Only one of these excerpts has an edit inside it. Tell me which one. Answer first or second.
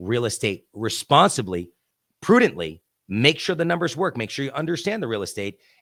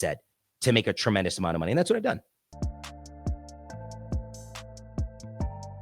second